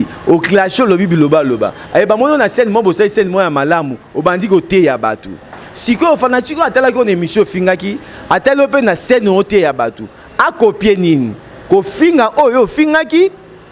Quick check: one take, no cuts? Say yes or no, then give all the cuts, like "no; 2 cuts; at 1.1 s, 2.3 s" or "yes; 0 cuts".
yes; 0 cuts